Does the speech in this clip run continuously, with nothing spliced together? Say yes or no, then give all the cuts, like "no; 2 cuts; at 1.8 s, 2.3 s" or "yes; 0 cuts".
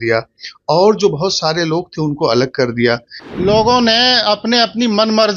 no; 1 cut; at 3.1 s